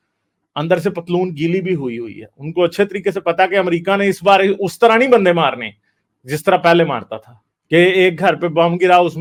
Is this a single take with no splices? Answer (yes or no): yes